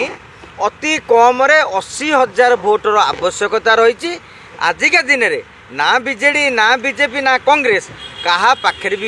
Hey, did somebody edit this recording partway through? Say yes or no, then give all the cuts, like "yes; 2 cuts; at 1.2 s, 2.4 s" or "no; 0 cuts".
no; 0 cuts